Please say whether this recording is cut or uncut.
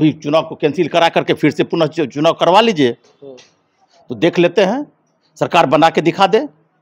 uncut